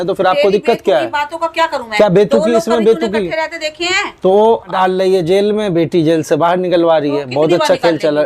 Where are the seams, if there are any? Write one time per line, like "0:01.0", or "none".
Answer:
0:04.7